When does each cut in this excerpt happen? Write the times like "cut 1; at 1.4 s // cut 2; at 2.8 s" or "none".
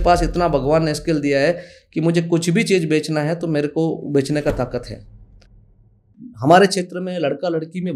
cut 1; at 5.7 s